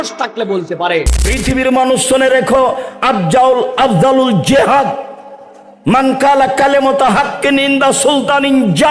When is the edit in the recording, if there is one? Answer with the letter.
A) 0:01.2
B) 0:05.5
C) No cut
A